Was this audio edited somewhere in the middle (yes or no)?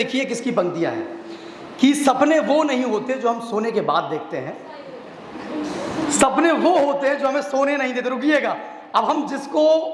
no